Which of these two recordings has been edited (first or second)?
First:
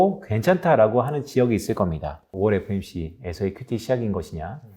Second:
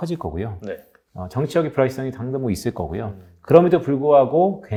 first